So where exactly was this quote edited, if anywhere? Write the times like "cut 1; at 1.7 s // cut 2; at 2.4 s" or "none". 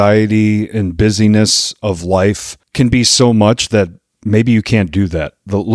cut 1; at 2.6 s